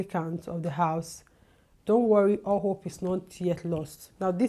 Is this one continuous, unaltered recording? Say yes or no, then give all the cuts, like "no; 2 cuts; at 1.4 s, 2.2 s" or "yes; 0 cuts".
yes; 0 cuts